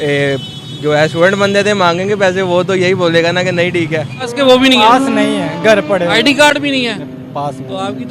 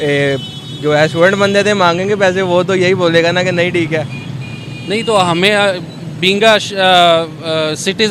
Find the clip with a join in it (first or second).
first